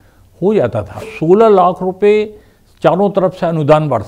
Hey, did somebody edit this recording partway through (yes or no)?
yes